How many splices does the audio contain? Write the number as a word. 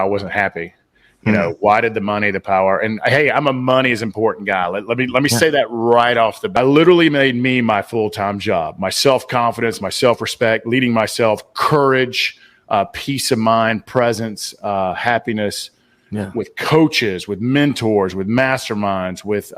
one